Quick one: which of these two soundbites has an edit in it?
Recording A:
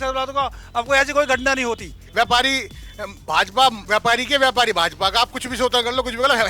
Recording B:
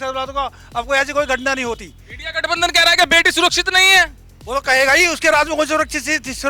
A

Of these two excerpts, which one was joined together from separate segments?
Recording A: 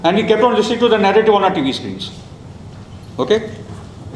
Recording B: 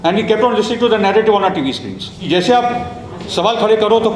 B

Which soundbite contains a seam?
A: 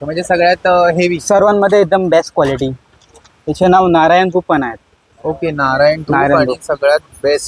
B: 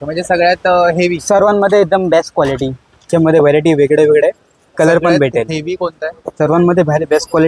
B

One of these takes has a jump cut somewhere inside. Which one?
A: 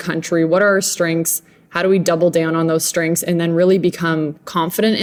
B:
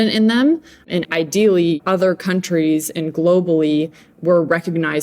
B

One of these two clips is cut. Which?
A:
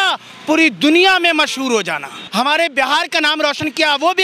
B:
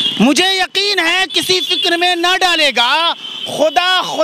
A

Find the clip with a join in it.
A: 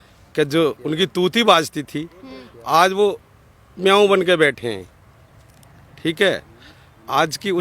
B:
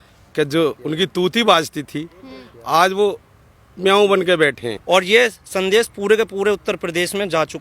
B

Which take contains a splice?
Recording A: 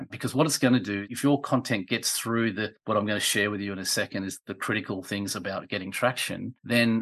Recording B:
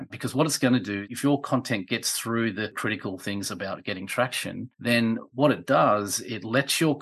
B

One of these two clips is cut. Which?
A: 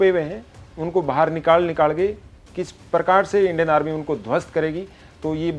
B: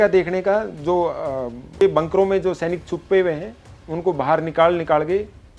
B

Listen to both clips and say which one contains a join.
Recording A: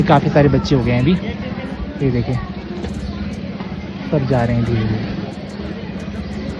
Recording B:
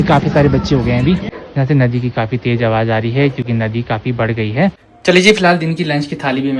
B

